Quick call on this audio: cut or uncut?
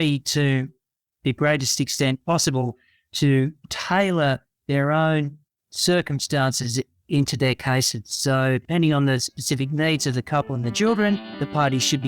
cut